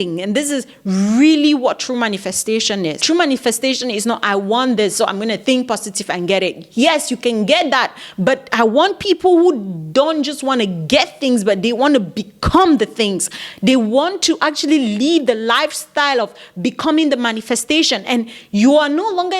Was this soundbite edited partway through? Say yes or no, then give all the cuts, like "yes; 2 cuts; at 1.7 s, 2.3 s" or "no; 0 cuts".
yes; 1 cut; at 3.0 s